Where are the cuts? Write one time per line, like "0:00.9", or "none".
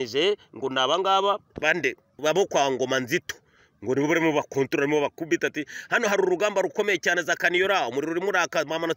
0:02.2

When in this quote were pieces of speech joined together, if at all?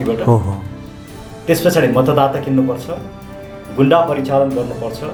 none

